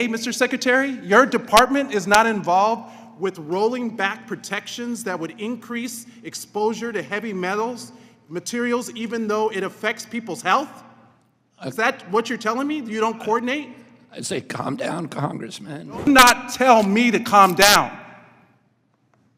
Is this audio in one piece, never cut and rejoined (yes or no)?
no